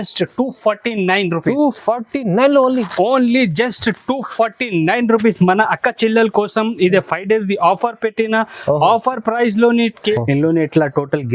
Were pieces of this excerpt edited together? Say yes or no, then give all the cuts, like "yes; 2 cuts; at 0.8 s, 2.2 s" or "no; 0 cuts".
yes; 1 cut; at 10.2 s